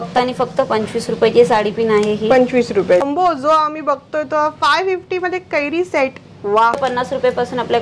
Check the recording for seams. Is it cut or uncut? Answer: cut